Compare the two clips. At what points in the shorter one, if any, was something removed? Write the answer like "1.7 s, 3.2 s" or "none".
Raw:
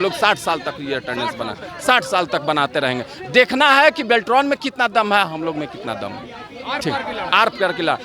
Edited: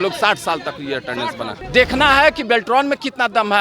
1.6 s